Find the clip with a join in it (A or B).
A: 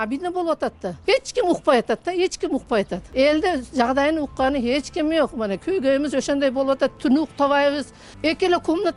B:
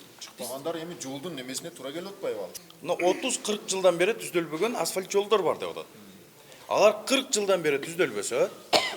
B